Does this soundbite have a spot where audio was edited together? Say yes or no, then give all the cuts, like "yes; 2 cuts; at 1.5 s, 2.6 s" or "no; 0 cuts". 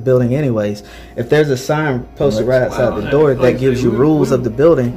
no; 0 cuts